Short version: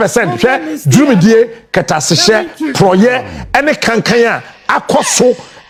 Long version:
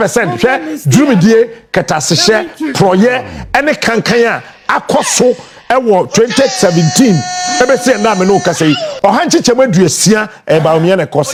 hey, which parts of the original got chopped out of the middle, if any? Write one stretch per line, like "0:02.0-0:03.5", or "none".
none